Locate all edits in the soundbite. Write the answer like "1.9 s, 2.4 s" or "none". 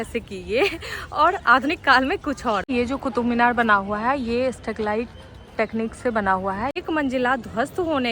2.6 s, 6.8 s